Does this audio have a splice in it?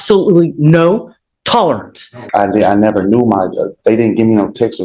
yes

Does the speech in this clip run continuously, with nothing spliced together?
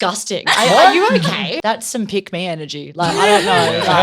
no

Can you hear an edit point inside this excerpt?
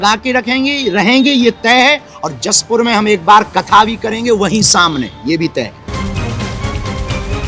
yes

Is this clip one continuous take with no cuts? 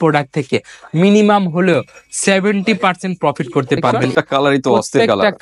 no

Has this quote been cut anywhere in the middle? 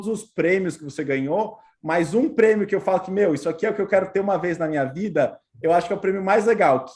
no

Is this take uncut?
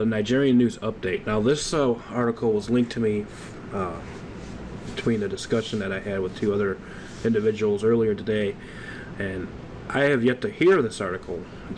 no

